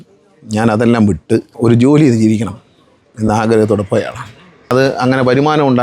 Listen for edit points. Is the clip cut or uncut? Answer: cut